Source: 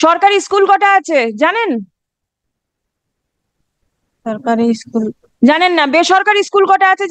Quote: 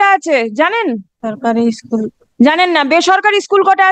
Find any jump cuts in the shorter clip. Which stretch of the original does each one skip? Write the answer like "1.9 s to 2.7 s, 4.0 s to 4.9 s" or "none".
1.9 s to 4.1 s